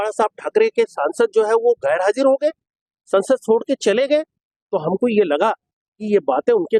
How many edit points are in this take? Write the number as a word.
zero